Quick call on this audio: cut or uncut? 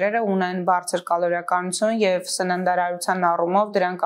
uncut